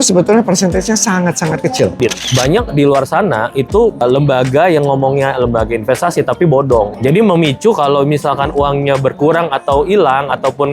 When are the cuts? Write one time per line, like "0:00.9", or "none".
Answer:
0:02.0